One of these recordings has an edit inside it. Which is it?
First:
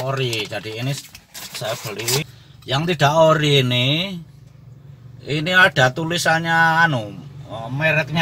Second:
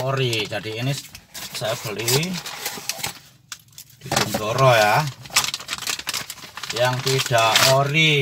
first; 1 cut; at 2.2 s

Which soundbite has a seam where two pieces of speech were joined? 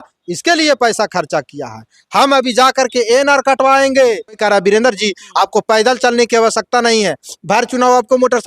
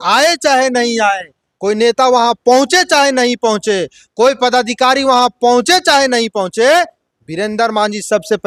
first; 1 cut; at 4.4 s

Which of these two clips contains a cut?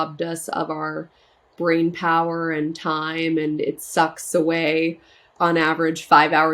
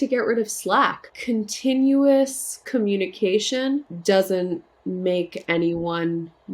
second; 3 cuts; at 1.1 s, 3.9 s, 4.7 s

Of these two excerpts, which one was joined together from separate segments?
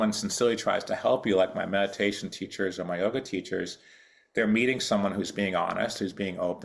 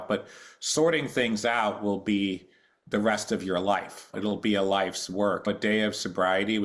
second; 2 cuts; at 4.1 s, 5.5 s

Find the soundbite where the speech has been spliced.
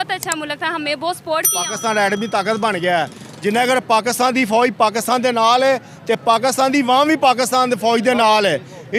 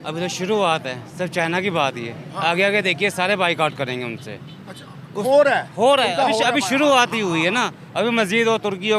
first; 1 cut; at 1.6 s

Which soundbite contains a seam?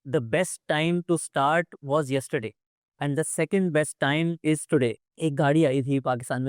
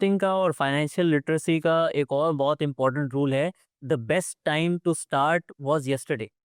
first; 1 cut; at 5.1 s

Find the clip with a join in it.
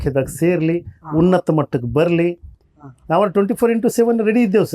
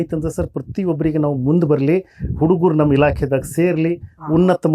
first; 1 cut; at 2.6 s

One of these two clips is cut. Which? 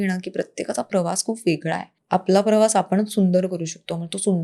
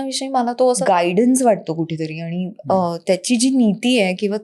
first; 1 cut; at 1.9 s

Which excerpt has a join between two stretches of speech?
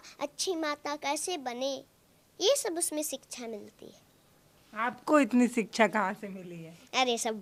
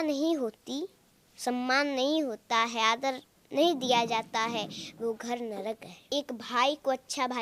second; 1 cut; at 6.0 s

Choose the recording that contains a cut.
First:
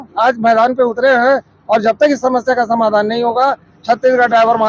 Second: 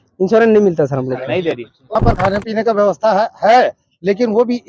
second; 1 cut; at 1.8 s

